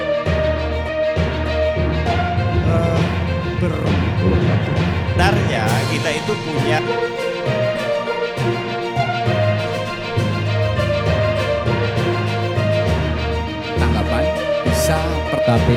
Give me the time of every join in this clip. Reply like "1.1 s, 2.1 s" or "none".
none